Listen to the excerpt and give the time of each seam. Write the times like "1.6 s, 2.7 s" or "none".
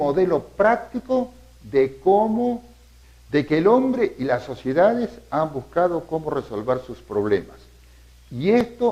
none